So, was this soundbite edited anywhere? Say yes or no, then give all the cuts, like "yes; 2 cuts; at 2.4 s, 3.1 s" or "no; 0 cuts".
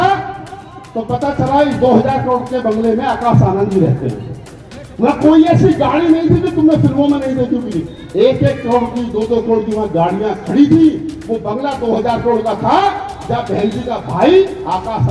no; 0 cuts